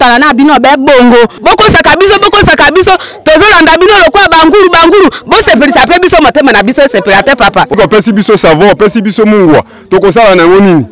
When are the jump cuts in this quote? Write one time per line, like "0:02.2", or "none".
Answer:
0:01.4
0:07.7

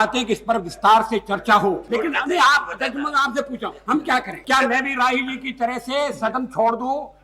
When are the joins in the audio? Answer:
0:01.8
0:04.4

